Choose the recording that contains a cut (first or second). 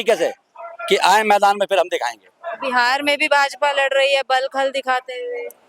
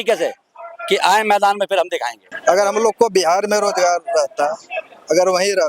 second